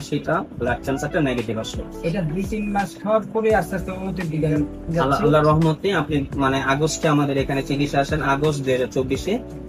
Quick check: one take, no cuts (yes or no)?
yes